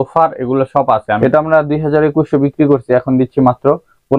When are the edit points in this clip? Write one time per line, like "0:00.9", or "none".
0:01.2